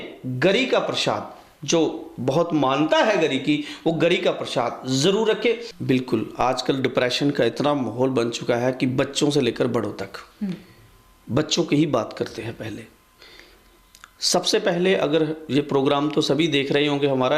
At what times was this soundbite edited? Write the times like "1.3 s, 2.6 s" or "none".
5.7 s